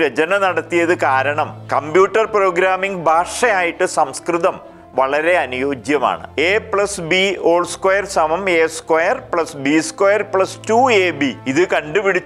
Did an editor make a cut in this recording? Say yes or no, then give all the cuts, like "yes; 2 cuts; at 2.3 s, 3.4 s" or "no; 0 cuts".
yes; 3 cuts; at 1.6 s, 6.2 s, 11.4 s